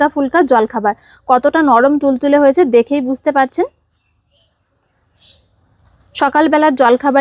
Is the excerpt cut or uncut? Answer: uncut